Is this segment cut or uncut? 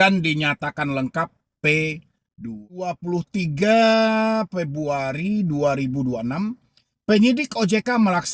cut